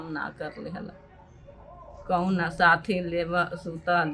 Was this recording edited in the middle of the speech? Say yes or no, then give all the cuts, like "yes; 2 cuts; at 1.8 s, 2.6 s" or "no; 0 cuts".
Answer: no; 0 cuts